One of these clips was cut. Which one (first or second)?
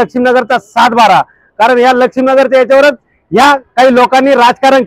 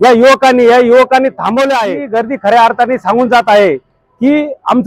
second